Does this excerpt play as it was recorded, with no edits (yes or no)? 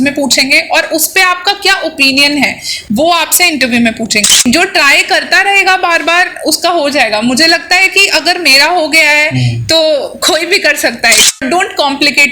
no